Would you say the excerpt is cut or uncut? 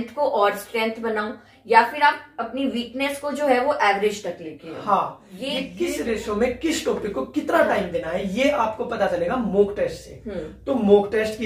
cut